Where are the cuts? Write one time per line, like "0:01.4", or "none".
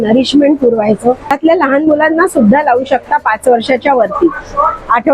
0:01.4